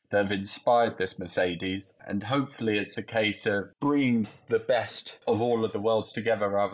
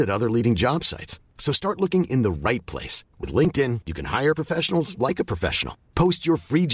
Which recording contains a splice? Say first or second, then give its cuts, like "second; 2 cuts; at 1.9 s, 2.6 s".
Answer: first; 3 cuts; at 2.0 s, 3.7 s, 5.2 s